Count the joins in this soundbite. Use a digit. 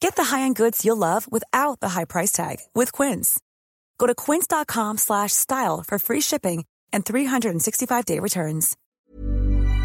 1